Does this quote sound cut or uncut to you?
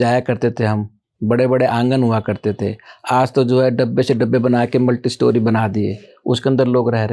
uncut